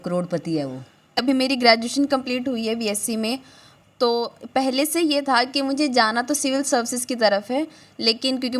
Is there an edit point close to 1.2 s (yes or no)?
yes